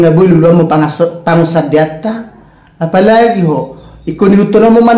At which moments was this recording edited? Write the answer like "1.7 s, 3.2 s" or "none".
none